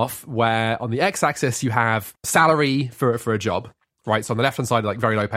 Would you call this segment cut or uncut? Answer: cut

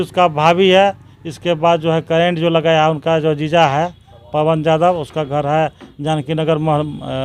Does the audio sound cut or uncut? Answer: uncut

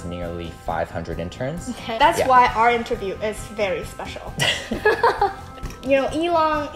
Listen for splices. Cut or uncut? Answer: cut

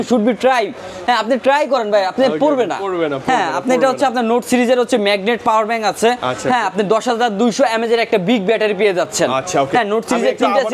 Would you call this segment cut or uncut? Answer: uncut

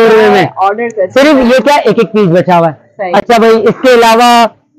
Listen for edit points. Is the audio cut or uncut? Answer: uncut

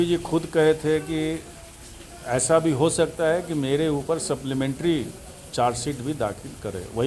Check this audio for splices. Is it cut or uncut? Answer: uncut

